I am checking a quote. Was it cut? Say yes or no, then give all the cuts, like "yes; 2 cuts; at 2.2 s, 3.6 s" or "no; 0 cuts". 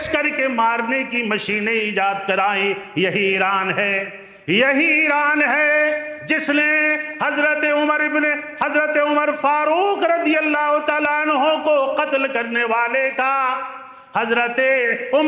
no; 0 cuts